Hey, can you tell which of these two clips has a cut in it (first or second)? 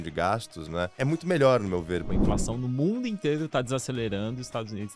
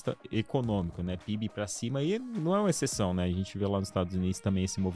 first